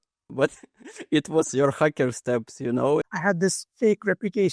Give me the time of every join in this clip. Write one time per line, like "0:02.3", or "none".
0:03.1